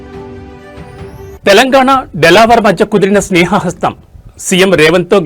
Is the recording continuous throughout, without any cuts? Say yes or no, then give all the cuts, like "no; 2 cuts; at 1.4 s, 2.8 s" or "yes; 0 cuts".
yes; 0 cuts